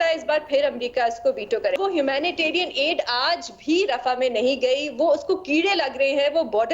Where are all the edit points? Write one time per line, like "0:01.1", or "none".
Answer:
0:01.8